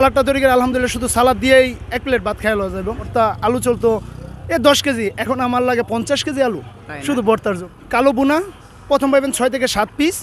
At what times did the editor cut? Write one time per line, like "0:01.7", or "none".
0:03.1
0:07.7